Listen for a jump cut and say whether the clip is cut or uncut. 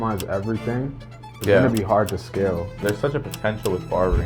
cut